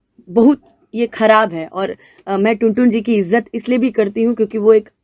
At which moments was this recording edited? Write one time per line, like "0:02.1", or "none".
none